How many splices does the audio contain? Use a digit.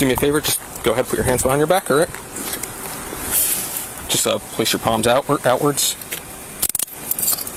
0